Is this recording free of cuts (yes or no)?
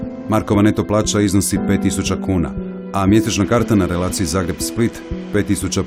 yes